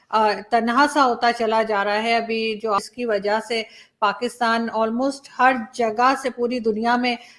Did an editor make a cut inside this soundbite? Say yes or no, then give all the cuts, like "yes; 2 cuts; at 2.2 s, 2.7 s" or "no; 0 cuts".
yes; 1 cut; at 2.8 s